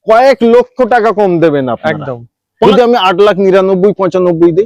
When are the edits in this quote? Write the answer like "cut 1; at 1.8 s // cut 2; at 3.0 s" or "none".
cut 1; at 2.7 s